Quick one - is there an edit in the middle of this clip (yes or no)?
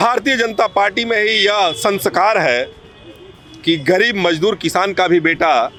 no